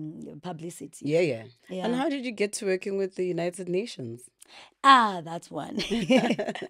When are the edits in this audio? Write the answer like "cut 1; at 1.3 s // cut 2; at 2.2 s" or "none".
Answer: cut 1; at 1.6 s